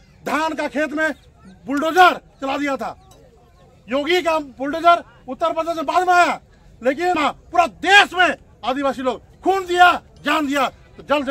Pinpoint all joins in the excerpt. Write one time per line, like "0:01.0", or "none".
0:07.2

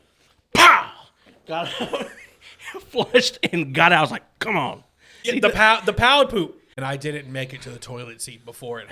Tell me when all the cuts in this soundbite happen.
0:05.3
0:06.7

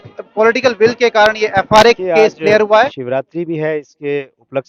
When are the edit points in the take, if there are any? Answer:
0:03.0

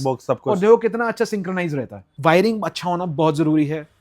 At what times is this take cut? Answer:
0:02.0

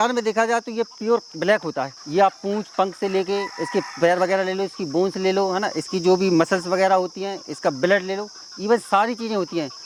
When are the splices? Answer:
none

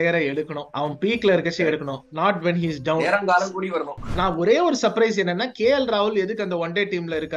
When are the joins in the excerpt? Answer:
0:04.1

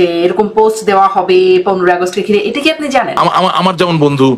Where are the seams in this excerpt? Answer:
0:03.1

